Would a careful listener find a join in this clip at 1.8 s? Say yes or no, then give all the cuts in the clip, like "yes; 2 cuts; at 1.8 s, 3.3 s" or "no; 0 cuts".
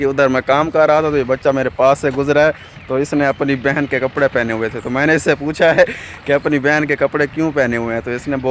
no; 0 cuts